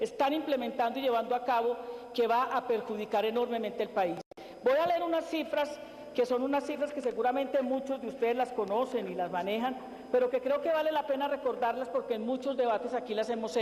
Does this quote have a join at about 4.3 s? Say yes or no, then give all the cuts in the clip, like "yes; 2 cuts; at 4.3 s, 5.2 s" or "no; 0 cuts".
yes; 1 cut; at 4.3 s